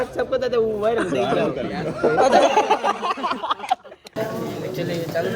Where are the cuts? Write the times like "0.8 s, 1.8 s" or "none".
4.1 s